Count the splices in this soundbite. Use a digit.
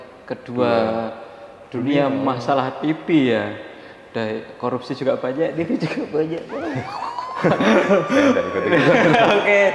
0